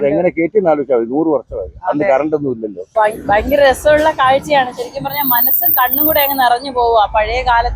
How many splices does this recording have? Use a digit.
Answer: 1